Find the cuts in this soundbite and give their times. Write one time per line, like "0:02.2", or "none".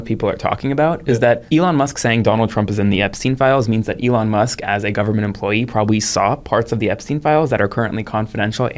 0:01.4